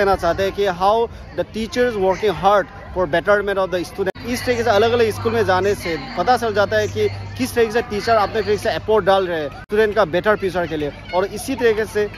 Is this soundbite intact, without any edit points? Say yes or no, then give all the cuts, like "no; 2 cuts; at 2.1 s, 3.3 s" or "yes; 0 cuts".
no; 2 cuts; at 4.1 s, 9.6 s